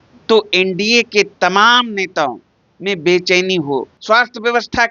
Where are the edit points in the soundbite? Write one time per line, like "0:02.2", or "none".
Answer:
0:03.9